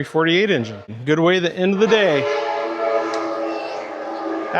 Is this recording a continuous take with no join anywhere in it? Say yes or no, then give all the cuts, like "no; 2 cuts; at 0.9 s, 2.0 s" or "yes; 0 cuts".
no; 1 cut; at 0.9 s